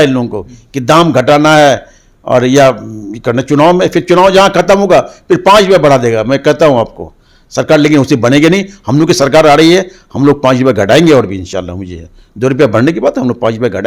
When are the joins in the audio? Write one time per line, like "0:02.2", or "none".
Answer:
none